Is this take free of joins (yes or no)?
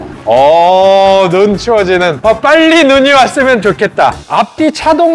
no